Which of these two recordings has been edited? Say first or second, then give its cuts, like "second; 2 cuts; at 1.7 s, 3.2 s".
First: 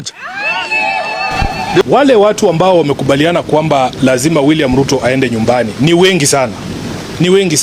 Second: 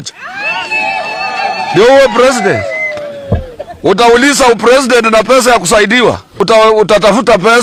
first; 1 cut; at 1.8 s